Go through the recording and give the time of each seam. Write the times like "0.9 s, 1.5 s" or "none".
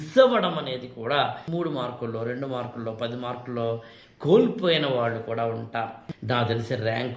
1.4 s, 6.1 s